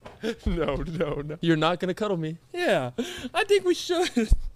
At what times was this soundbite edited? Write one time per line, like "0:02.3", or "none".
0:01.3
0:02.4

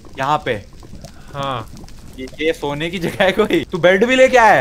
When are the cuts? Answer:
0:03.7

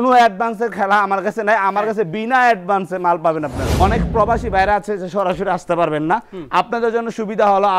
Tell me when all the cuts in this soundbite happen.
0:03.6

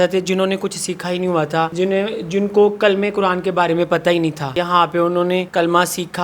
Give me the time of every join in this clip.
0:01.7
0:04.5
0:05.5

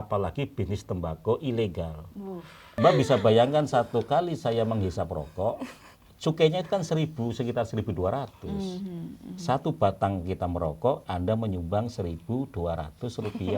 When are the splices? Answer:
0:02.7

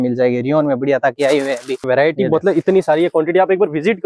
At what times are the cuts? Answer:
0:01.9

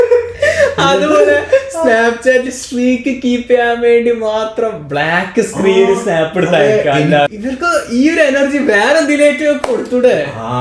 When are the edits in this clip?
0:07.3

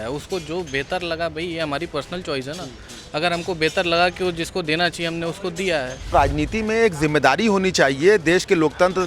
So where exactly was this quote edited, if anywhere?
0:06.1

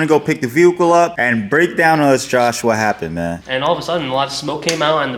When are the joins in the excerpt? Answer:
0:01.2
0:03.4

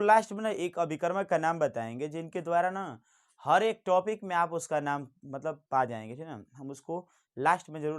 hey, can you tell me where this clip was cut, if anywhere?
none

